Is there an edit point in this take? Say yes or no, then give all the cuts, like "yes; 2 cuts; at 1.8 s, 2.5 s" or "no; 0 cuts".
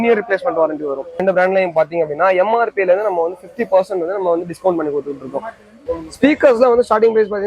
yes; 2 cuts; at 1.2 s, 5.9 s